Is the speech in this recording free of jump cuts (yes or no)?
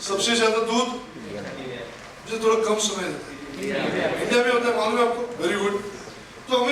yes